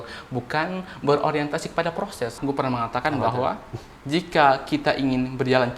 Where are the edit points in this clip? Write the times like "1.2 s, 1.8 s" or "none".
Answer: 2.4 s